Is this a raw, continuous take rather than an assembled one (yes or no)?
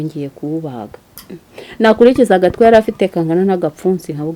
yes